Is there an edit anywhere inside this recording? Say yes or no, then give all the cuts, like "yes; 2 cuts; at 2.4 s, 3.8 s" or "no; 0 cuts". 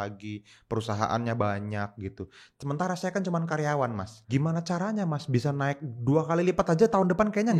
yes; 1 cut; at 4.1 s